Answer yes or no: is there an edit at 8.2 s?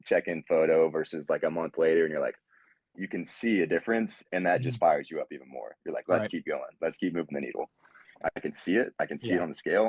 yes